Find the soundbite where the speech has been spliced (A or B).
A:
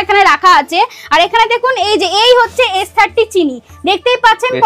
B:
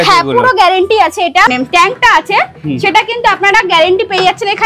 B